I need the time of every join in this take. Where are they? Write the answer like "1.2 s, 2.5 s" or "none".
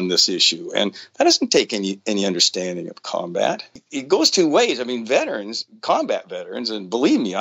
3.7 s